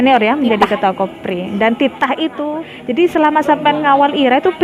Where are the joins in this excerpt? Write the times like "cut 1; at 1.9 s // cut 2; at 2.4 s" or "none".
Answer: cut 1; at 2.7 s

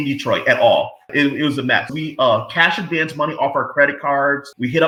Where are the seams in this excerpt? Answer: none

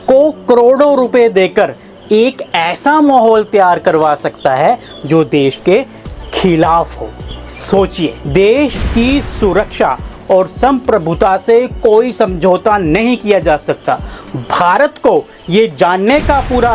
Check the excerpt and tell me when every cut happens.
cut 1; at 8.2 s

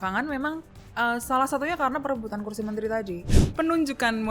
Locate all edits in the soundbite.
cut 1; at 3.3 s

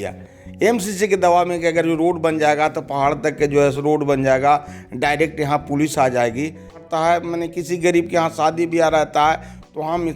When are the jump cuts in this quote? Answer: cut 1; at 6.8 s

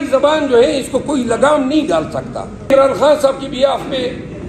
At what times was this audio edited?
cut 1; at 2.7 s

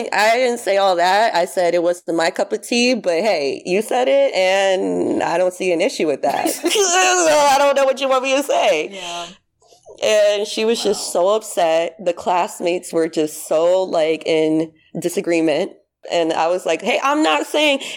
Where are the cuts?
cut 1; at 16.0 s

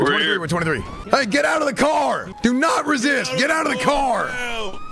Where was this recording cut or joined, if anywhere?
cut 1; at 0.9 s // cut 2; at 2.3 s

